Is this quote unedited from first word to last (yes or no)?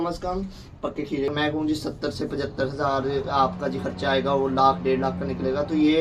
no